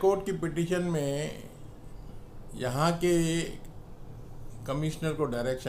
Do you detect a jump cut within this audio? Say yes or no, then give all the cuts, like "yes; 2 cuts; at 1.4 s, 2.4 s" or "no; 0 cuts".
no; 0 cuts